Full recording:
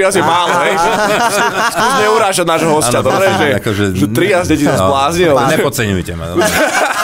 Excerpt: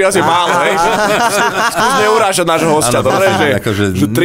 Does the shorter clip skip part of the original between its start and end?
no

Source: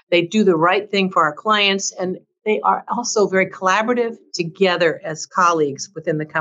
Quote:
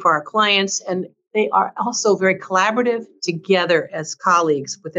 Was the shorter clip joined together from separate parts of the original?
no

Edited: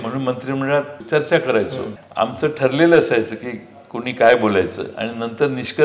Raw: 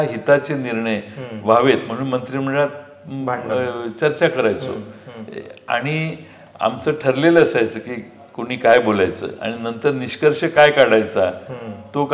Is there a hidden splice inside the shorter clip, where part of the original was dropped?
yes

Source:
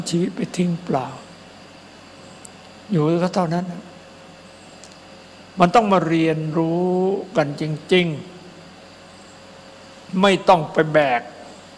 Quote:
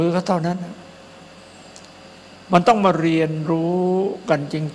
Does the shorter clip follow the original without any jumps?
yes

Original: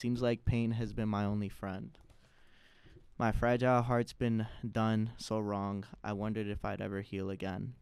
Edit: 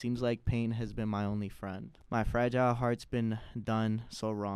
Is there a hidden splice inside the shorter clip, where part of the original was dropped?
yes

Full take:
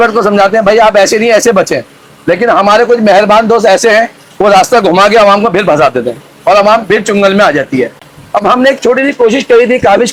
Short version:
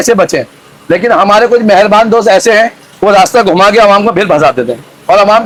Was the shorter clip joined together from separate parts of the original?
no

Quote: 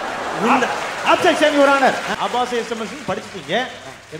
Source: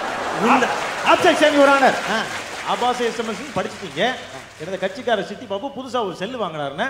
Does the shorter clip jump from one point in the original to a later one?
yes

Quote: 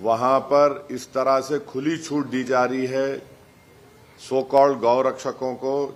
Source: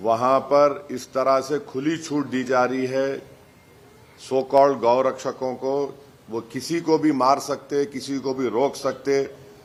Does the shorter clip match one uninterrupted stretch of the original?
yes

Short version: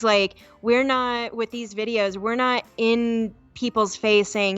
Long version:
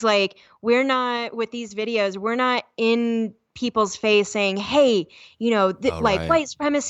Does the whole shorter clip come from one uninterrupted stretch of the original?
yes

